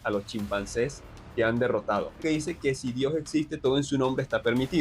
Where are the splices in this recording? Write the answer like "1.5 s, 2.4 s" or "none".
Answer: 2.1 s